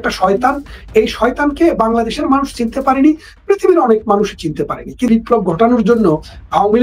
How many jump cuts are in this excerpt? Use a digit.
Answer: 1